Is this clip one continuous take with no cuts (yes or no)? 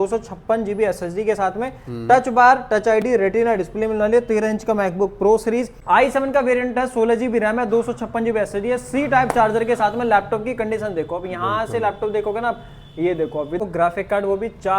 no